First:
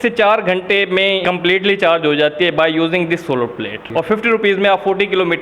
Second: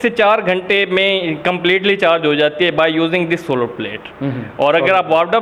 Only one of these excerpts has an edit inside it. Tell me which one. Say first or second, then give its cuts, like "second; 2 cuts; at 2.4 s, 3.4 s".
first; 2 cuts; at 1.2 s, 3.8 s